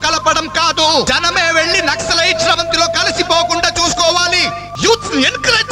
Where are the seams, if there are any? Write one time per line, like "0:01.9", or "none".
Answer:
0:01.1
0:04.7